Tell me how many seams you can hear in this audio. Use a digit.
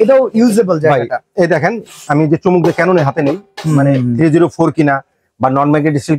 0